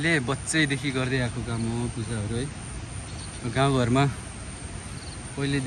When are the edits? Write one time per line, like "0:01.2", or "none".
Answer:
none